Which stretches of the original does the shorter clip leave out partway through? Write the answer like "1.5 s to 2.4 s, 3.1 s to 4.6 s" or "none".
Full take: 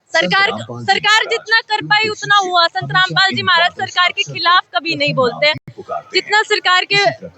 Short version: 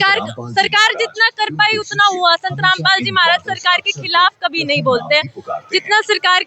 5.7 s to 5.8 s